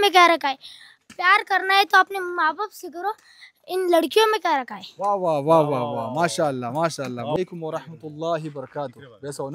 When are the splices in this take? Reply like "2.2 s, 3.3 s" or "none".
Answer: 7.4 s